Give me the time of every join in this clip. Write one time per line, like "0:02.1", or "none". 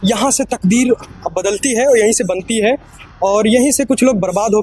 none